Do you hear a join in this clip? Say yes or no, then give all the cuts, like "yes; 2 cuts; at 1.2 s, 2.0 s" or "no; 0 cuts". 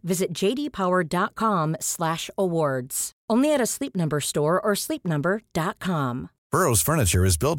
no; 0 cuts